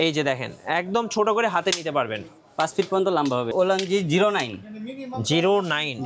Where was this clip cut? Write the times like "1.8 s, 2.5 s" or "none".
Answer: 3.5 s